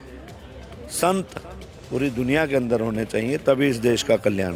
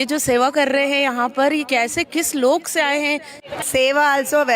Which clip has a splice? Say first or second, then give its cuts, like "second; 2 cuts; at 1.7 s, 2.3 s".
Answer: second; 2 cuts; at 1.7 s, 3.5 s